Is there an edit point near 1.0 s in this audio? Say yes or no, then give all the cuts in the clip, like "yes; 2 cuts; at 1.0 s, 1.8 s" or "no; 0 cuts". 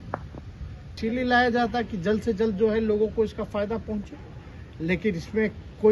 yes; 1 cut; at 1.0 s